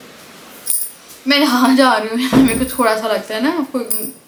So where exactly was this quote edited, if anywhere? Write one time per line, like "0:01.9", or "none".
none